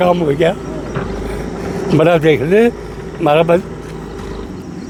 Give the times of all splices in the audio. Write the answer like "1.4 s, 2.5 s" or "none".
none